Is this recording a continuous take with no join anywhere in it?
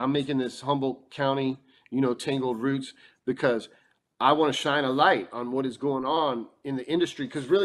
yes; 0 cuts

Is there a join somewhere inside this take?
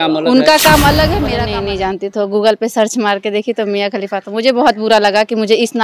yes; 1 cut; at 1.3 s

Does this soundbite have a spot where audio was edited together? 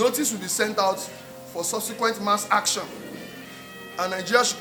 no; 0 cuts

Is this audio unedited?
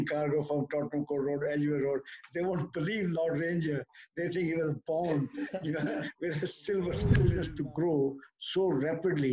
no; 1 cut; at 7.2 s

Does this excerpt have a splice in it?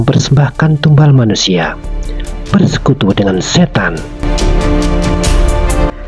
no; 0 cuts

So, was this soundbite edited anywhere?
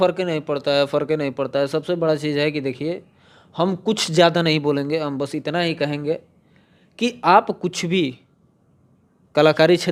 no; 0 cuts

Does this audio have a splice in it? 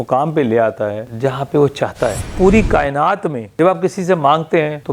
yes; 1 cut; at 2.2 s

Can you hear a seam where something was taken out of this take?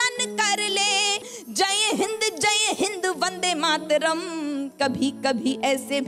yes; 1 cut; at 1.2 s

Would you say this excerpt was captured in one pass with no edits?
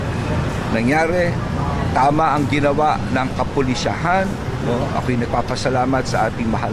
yes; 0 cuts

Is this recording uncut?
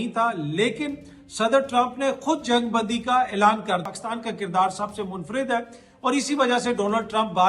no; 1 cut; at 3.9 s

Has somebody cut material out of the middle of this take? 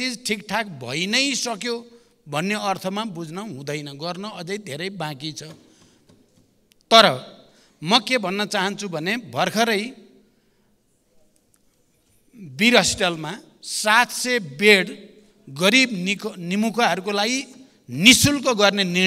no; 0 cuts

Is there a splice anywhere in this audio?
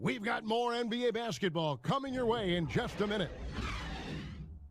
yes; 1 cut; at 3.3 s

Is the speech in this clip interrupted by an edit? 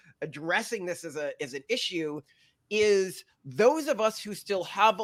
no; 0 cuts

